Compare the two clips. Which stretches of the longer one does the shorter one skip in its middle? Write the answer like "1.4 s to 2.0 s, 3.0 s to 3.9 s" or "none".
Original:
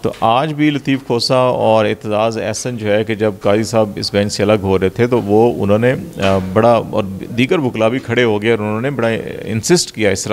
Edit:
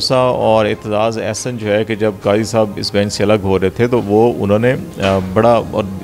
none